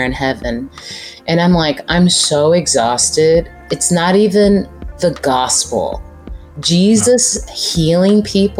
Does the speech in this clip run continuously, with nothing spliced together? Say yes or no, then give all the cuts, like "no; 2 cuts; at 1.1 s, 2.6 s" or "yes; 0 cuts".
no; 2 cuts; at 3.6 s, 4.8 s